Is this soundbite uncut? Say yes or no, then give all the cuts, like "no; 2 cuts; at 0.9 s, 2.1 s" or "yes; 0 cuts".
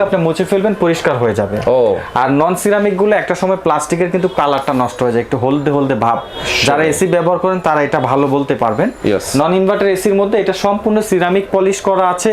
yes; 0 cuts